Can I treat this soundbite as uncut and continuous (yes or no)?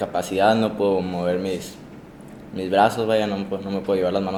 yes